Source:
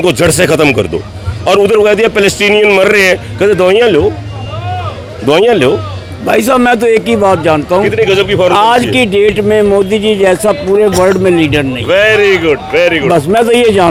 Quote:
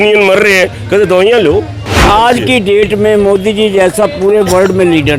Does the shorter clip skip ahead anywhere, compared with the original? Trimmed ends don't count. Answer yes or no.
yes